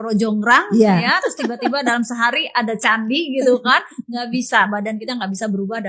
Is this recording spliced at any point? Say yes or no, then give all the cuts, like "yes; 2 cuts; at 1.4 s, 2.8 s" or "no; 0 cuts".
no; 0 cuts